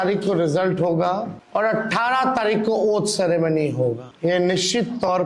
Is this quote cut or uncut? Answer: cut